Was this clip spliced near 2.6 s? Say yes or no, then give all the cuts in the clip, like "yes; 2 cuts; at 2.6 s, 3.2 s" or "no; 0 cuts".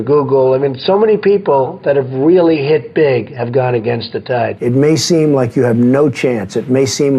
no; 1 cut; at 4.6 s